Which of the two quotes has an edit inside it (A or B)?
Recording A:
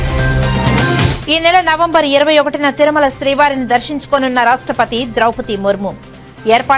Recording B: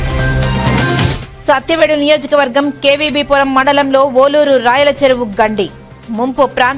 B